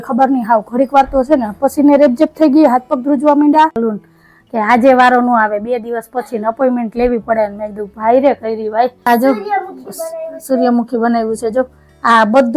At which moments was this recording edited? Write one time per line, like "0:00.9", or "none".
0:03.8
0:09.1